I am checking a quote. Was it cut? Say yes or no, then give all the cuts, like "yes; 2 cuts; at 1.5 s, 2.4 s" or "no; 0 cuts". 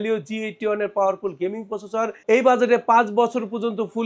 no; 0 cuts